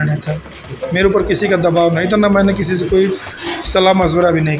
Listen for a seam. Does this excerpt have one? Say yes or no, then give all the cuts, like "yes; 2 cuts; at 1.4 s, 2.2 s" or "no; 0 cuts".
no; 0 cuts